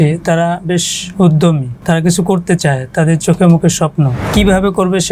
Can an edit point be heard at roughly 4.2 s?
yes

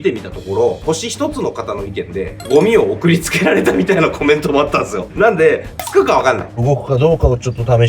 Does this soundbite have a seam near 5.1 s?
yes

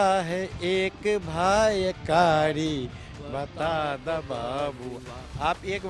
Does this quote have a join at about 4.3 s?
no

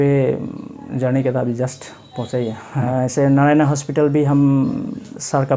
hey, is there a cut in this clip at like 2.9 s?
yes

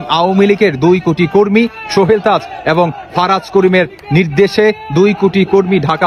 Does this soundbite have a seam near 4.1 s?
no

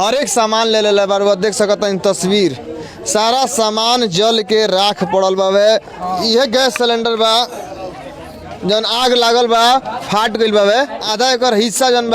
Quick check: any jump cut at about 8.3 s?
no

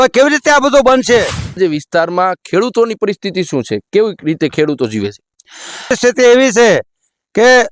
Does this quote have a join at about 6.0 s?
yes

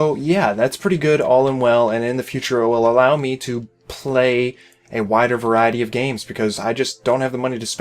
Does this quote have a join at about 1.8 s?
yes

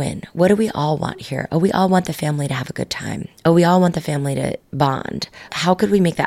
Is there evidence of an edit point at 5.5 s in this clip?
yes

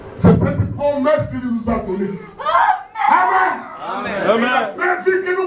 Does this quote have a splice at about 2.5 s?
no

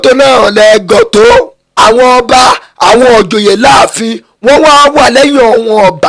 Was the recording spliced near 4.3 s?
no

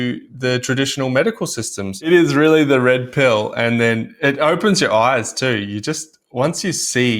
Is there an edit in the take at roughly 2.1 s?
yes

